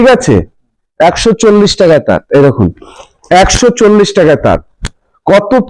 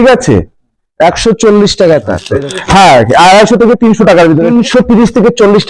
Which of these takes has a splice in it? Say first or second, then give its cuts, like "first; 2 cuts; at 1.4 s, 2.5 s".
second; 2 cuts; at 2.2 s, 4.5 s